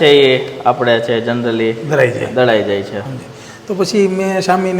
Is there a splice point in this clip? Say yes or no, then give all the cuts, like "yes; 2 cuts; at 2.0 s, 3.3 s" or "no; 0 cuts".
no; 0 cuts